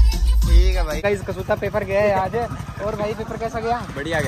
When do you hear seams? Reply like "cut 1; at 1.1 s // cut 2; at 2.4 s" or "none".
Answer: cut 1; at 1.0 s